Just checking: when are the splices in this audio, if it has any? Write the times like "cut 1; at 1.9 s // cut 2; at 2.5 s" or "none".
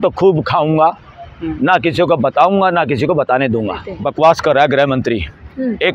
cut 1; at 4.0 s